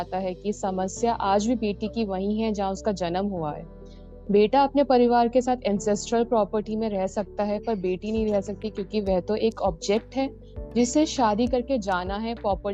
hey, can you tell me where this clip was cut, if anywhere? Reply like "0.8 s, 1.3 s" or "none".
none